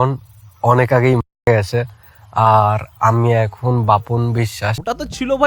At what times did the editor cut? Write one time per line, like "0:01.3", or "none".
none